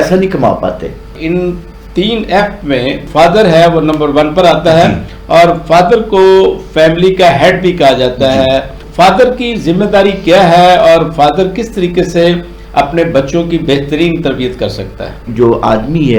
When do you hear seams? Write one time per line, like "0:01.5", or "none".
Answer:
0:01.2
0:03.1
0:08.8
0:15.3